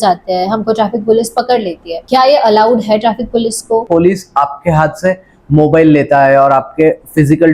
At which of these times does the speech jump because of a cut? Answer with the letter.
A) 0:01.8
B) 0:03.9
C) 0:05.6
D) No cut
B